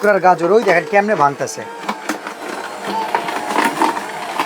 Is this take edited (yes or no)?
no